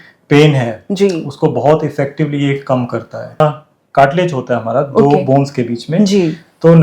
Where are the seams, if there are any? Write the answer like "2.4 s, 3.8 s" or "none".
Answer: 3.4 s